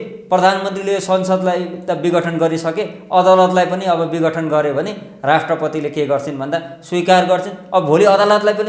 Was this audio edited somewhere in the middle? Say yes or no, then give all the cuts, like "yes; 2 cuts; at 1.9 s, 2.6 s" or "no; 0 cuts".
no; 0 cuts